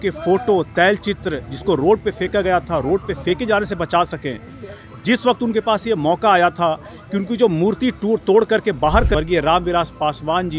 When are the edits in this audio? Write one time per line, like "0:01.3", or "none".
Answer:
0:09.2